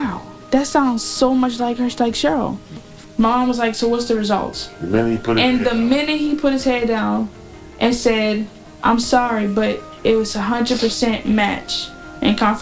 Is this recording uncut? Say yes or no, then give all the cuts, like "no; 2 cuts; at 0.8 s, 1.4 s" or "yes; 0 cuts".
no; 1 cut; at 2.9 s